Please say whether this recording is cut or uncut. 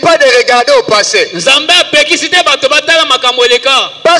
uncut